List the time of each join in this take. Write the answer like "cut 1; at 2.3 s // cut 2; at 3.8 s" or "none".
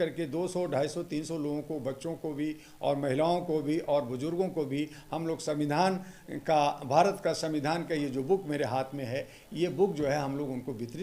none

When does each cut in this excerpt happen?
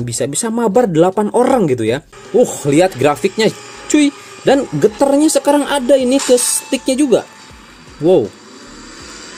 cut 1; at 2.1 s

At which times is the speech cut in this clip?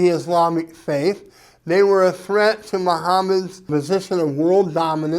cut 1; at 3.6 s

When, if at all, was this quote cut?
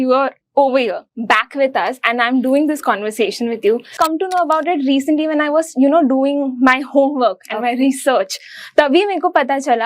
cut 1; at 3.9 s

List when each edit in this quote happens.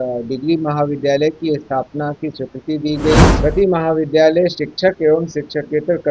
cut 1; at 3.3 s

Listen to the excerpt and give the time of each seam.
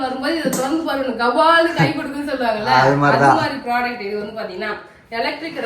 none

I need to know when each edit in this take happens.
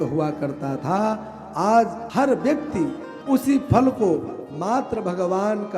cut 1; at 2.0 s

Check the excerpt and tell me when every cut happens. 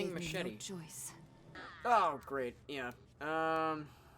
cut 1; at 1.6 s

